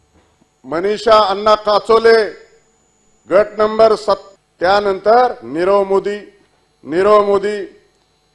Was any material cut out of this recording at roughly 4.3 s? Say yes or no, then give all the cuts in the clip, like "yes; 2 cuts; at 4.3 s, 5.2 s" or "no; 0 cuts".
yes; 1 cut; at 4.3 s